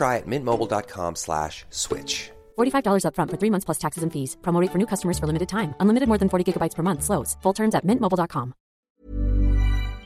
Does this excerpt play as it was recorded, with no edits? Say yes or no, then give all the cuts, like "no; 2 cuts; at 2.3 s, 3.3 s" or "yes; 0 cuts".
no; 1 cut; at 8.9 s